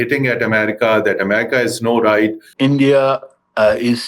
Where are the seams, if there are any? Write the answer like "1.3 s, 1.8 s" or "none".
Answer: 2.5 s